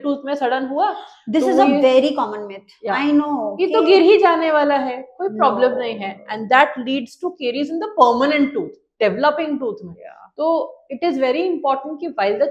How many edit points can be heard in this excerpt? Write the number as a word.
zero